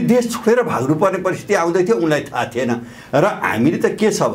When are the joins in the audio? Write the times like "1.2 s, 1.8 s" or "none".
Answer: none